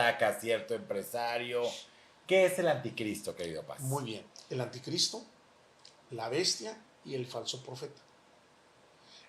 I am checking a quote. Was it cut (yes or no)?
yes